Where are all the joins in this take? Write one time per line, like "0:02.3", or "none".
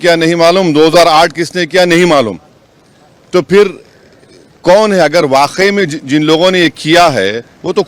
none